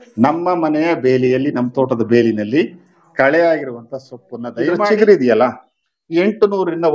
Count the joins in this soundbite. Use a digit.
1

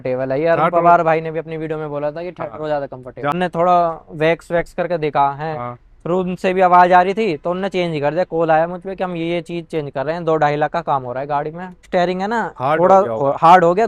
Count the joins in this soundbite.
2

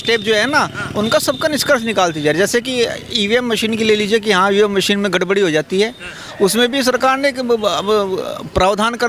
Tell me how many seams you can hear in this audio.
0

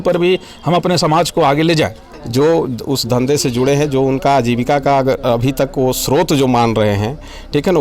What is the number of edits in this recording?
1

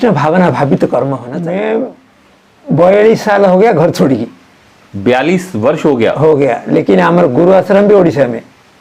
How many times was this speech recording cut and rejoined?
1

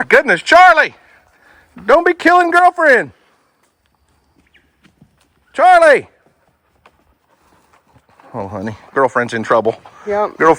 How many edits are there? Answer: 0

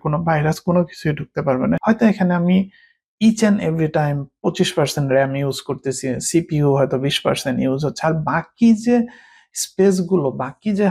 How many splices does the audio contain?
1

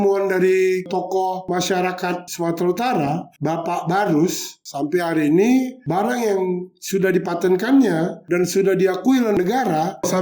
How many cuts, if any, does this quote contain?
2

